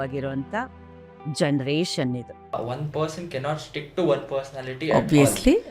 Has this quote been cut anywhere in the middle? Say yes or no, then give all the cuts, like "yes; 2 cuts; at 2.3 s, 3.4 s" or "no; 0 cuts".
yes; 1 cut; at 2.6 s